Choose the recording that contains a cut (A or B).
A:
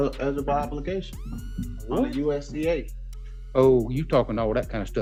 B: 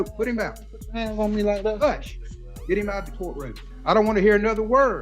B